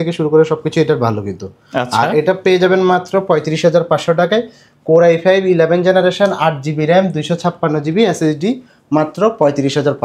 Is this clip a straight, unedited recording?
yes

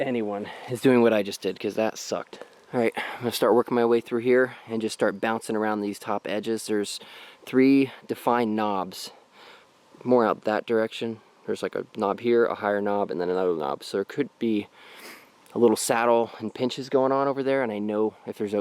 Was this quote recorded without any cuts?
yes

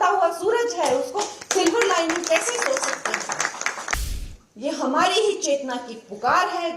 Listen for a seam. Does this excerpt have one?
yes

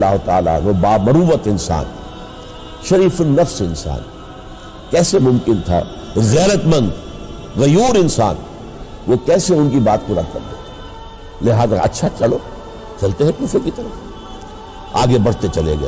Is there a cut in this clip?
no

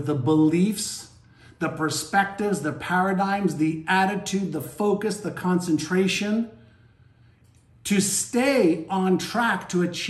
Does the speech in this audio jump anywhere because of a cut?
no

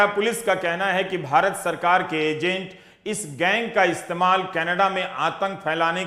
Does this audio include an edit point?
no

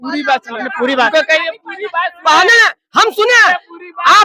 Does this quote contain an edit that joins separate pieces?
no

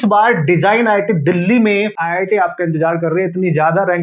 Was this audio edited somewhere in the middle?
yes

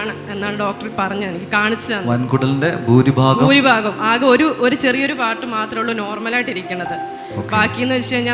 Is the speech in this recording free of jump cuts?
yes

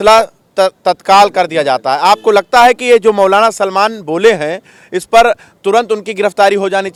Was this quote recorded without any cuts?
yes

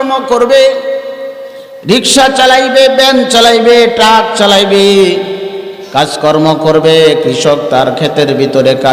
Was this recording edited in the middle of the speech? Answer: no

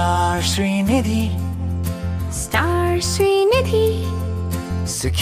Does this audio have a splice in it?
no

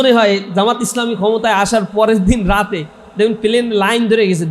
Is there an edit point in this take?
no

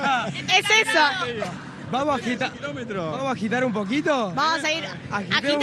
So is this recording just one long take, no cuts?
yes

